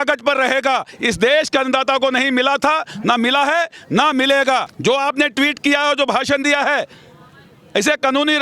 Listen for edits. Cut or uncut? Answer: cut